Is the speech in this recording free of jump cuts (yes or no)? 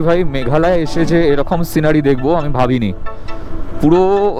yes